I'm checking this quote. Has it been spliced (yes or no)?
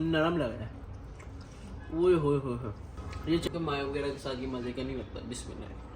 yes